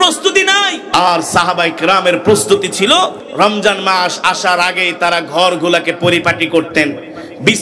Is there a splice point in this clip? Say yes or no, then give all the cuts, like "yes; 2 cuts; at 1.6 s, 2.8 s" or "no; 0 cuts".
yes; 2 cuts; at 0.9 s, 3.2 s